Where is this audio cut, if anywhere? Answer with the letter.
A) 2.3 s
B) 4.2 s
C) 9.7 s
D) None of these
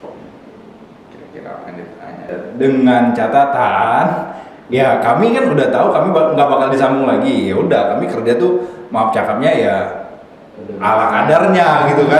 A